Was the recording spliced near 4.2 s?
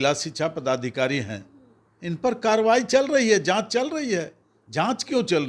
no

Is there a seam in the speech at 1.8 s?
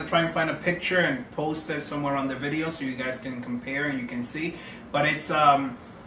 no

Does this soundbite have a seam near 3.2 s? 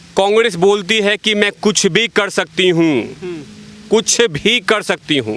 no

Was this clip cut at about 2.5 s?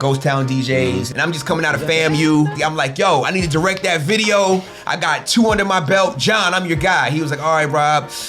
yes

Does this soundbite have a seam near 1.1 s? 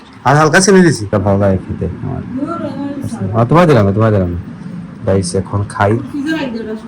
yes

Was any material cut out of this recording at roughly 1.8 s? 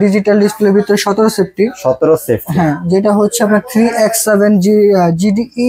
no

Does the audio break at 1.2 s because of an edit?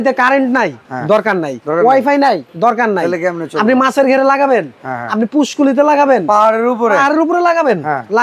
yes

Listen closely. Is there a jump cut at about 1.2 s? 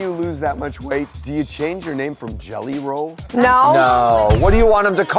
yes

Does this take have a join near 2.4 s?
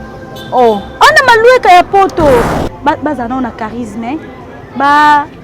yes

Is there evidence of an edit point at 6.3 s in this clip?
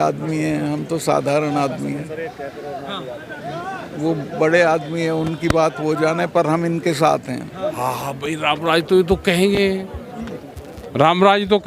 no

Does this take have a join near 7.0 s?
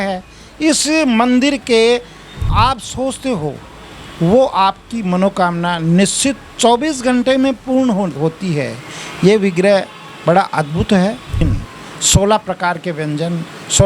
no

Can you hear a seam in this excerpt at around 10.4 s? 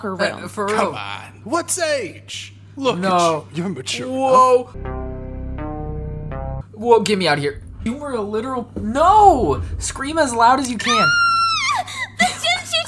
no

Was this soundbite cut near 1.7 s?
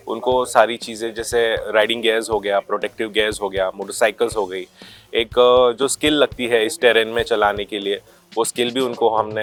no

